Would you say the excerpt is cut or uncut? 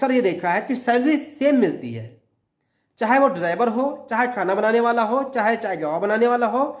uncut